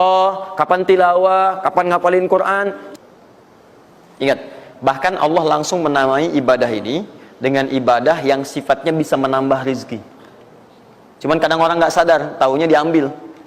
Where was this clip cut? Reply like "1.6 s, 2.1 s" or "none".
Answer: 2.8 s